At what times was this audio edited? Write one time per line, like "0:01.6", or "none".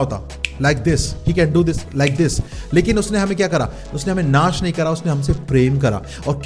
none